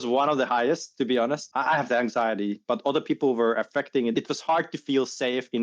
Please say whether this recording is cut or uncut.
cut